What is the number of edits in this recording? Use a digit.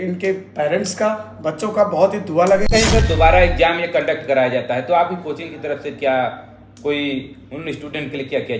1